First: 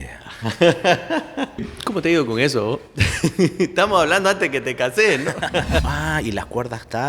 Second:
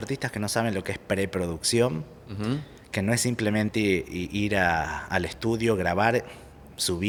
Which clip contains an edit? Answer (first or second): first